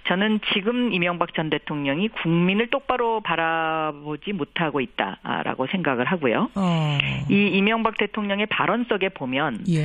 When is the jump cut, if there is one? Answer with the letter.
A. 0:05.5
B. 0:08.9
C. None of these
B